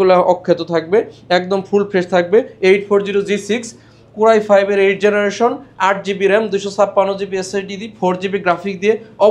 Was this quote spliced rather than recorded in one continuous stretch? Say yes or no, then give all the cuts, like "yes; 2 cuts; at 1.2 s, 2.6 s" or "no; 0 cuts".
no; 0 cuts